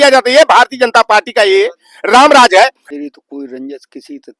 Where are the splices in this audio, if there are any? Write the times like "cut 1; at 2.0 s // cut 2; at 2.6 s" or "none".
cut 1; at 2.8 s